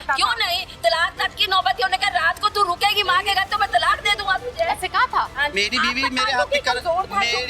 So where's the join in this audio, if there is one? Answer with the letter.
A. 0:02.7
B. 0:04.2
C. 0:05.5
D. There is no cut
C